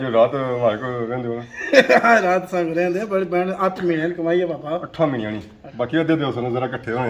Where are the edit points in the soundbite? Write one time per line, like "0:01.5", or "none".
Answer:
0:05.6